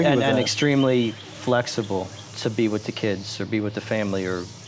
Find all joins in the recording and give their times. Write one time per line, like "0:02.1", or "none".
0:02.2